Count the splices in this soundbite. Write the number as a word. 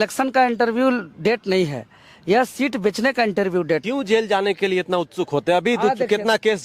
one